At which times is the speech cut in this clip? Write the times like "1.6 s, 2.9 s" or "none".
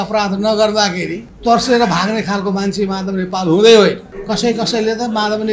1.2 s, 4.1 s